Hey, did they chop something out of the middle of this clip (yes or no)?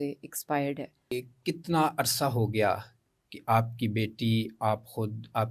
yes